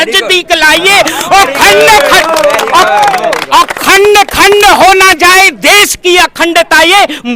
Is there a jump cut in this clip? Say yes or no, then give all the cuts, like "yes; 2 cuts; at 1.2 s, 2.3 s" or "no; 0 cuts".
no; 0 cuts